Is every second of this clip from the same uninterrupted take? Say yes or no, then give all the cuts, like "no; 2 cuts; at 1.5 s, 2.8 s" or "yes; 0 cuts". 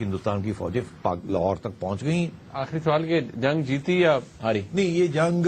no; 1 cut; at 2.6 s